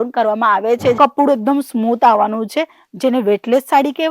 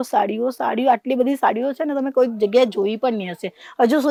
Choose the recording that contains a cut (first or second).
first